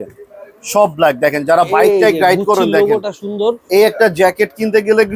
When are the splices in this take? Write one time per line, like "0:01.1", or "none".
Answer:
none